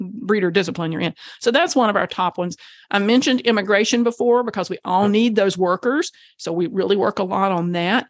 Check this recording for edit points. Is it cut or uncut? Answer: uncut